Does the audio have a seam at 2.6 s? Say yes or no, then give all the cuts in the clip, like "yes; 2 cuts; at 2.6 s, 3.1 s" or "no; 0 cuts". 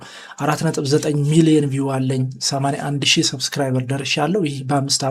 no; 0 cuts